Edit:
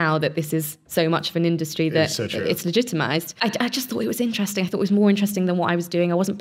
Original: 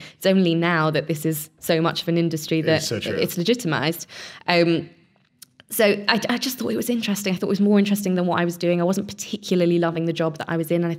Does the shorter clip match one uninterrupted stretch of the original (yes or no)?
no